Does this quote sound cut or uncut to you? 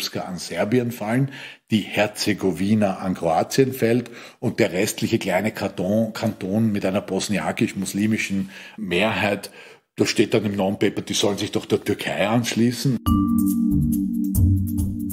uncut